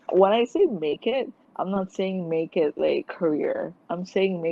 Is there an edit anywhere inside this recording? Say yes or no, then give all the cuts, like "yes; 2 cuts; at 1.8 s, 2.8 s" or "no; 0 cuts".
yes; 2 cuts; at 1.4 s, 3.1 s